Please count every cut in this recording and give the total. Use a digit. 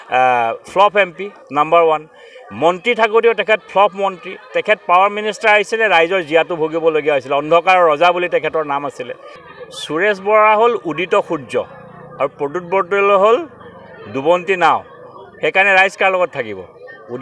1